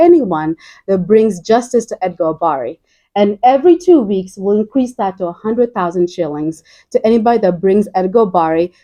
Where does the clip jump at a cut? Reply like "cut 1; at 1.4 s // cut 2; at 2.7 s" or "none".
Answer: none